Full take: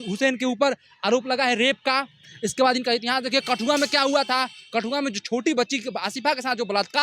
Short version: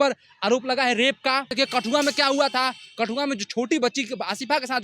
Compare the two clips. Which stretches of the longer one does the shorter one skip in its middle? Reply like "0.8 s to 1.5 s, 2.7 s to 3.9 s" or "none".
2.1 s to 3.3 s